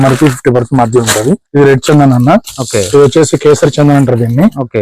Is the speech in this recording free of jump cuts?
no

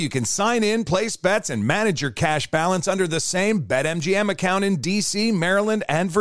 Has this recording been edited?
no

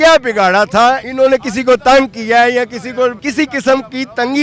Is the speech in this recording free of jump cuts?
no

